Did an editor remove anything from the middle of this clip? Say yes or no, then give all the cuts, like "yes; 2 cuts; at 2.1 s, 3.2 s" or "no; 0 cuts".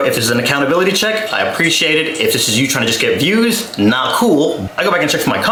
no; 0 cuts